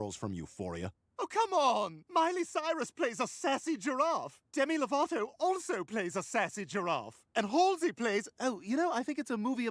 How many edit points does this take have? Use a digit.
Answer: 1